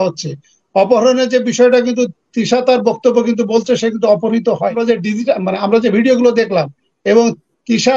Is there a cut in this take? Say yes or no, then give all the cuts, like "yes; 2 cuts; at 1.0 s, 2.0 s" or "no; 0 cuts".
yes; 1 cut; at 4.8 s